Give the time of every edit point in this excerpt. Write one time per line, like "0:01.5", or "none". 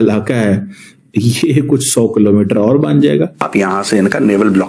0:03.4